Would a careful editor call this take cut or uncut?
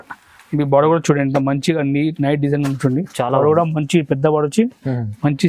uncut